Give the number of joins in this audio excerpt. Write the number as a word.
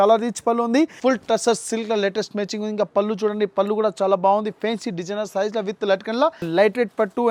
two